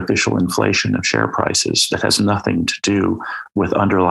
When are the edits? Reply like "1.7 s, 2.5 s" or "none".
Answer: none